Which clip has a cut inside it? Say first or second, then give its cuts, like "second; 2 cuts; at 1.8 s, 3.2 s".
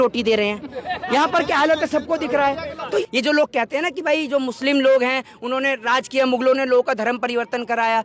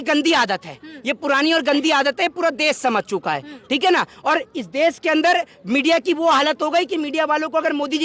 first; 1 cut; at 3.0 s